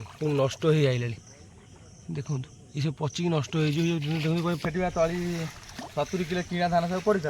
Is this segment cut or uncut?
cut